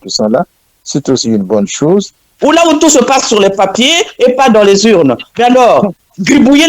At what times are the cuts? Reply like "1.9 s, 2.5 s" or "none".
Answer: 2.3 s